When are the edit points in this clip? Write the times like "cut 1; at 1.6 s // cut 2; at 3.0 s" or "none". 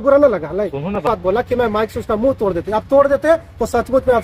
cut 1; at 1.0 s